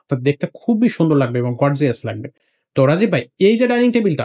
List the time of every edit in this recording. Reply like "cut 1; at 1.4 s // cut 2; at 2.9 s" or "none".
none